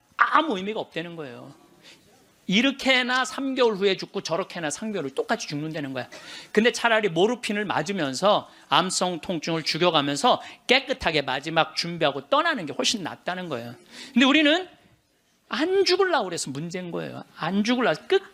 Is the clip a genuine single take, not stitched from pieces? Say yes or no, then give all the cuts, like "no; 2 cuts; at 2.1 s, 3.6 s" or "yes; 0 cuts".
yes; 0 cuts